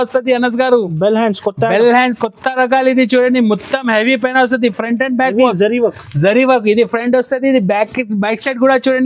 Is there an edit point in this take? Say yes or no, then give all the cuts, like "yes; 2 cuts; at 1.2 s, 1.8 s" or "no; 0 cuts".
no; 0 cuts